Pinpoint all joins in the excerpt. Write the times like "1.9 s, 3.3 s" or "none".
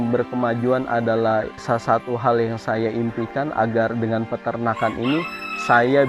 none